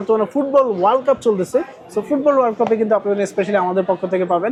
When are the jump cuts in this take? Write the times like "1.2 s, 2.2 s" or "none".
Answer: none